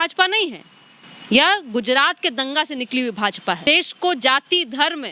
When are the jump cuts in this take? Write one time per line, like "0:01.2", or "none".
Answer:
0:03.7